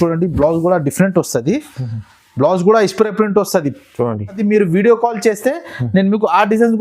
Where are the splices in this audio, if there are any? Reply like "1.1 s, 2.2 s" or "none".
4.4 s